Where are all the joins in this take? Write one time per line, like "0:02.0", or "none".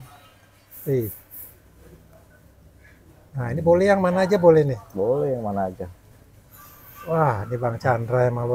none